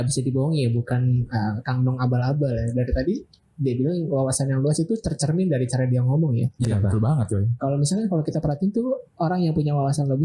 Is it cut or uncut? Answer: uncut